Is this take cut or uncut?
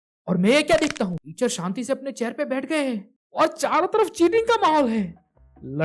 cut